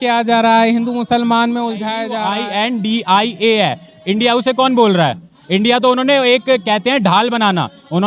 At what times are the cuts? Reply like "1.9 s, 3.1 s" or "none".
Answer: 2.2 s